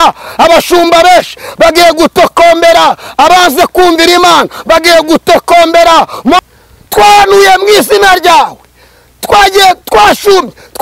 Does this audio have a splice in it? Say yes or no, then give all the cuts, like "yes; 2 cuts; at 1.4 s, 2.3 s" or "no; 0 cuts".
yes; 1 cut; at 6.4 s